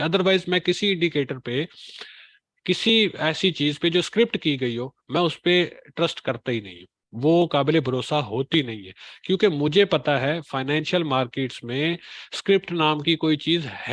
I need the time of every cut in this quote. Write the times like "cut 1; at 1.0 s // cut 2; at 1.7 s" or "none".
none